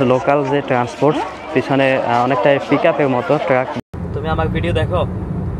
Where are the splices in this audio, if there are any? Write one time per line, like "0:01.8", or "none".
0:03.7